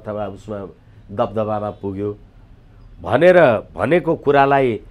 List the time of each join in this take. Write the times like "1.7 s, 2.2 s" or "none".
none